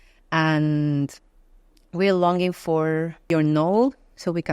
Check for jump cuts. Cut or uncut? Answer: cut